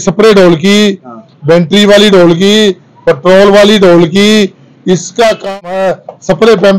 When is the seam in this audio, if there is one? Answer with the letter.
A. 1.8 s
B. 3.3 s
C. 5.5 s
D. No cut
C